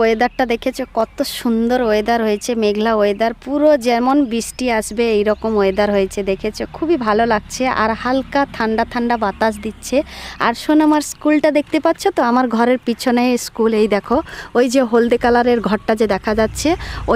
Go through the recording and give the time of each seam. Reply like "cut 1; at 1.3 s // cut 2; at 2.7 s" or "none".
none